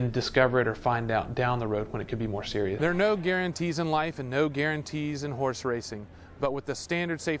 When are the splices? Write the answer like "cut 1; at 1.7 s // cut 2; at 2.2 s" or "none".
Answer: cut 1; at 2.8 s